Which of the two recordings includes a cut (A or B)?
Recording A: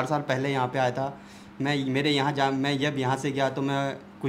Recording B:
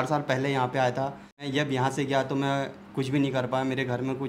B